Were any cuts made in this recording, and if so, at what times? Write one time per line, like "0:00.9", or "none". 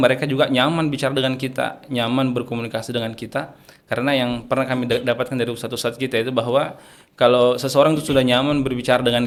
none